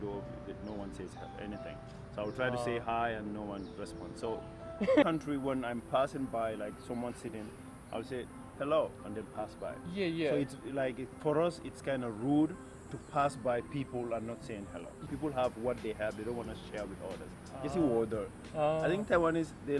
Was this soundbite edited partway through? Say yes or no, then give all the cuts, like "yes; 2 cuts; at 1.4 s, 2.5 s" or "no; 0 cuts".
yes; 2 cuts; at 5.0 s, 15.1 s